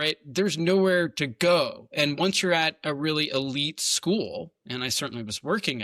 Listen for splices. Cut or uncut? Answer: uncut